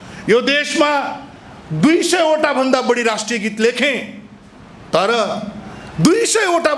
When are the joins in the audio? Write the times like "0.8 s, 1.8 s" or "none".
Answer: none